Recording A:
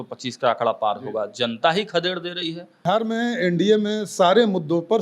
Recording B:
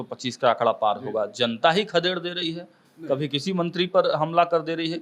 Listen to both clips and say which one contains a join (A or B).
A